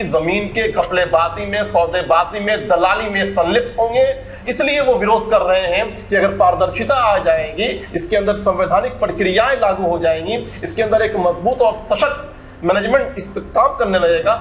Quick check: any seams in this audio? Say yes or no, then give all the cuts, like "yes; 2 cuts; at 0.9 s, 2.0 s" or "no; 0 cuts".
no; 0 cuts